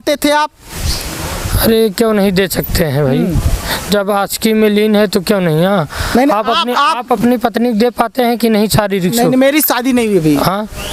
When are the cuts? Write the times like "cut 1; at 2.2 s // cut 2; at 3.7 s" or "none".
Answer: none